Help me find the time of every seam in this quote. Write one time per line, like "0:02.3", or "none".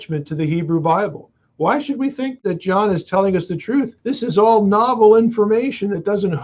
0:02.4
0:04.0